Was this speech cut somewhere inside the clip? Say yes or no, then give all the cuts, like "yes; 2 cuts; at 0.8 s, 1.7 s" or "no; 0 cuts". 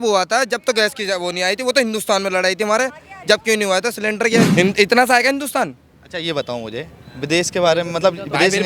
yes; 1 cut; at 4.5 s